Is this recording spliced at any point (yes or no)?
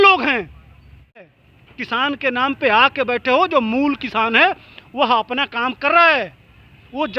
yes